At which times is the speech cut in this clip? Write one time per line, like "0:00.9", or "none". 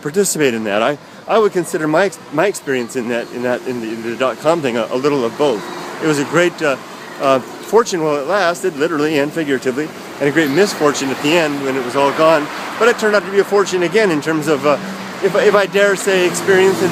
none